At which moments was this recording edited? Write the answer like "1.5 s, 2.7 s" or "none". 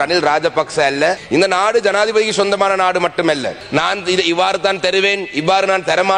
1.2 s, 3.6 s